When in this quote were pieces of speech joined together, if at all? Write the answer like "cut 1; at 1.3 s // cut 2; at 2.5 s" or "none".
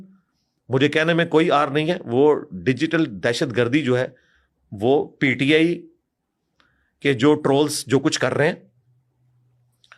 none